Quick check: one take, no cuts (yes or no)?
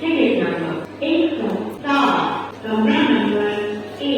no